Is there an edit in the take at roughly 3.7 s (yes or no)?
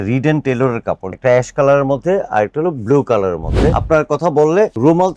yes